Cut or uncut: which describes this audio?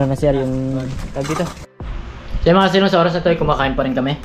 cut